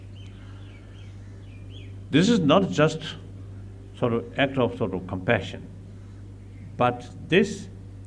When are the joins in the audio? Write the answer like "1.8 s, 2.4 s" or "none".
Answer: none